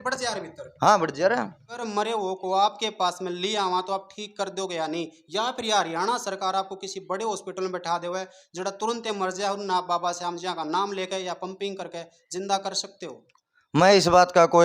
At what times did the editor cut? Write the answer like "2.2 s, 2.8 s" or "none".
1.8 s